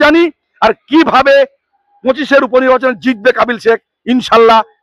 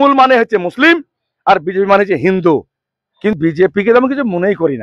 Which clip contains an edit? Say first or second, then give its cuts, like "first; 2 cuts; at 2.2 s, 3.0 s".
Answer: second; 1 cut; at 3.4 s